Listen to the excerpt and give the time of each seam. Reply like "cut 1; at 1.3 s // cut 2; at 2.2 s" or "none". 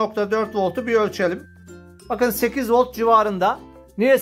none